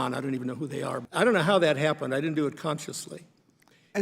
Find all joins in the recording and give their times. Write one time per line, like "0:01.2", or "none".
0:01.0